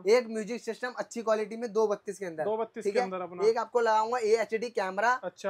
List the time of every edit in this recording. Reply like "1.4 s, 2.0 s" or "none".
none